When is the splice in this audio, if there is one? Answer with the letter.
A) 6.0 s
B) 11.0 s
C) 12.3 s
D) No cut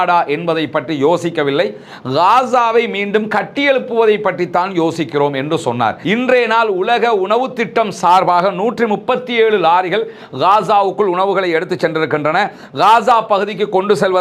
A